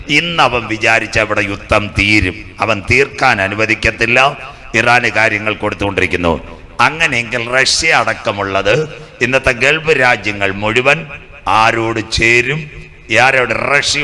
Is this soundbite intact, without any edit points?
yes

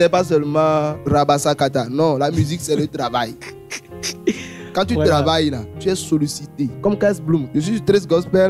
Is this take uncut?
no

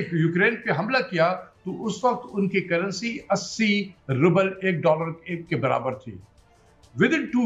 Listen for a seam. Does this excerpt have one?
no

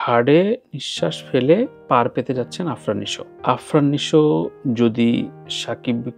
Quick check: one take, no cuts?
yes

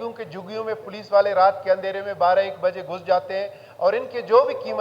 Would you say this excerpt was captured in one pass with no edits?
yes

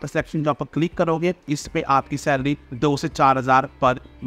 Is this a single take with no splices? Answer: no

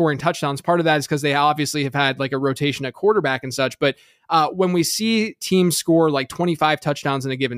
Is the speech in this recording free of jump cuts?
yes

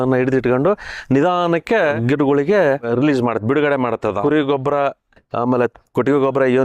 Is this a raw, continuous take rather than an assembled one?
no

